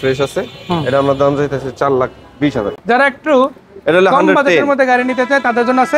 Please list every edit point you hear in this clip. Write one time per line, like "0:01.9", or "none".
0:00.8
0:02.7